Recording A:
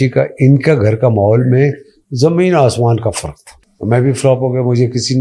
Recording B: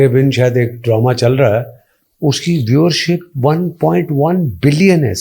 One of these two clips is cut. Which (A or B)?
A